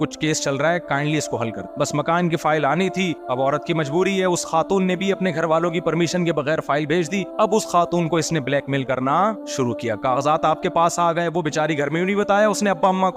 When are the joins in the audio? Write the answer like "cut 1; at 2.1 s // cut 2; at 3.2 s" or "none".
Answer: none